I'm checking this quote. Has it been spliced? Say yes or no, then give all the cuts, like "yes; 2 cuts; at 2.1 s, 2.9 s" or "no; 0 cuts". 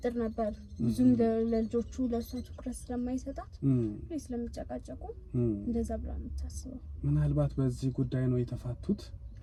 no; 0 cuts